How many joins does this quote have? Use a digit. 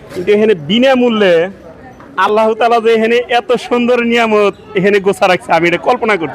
0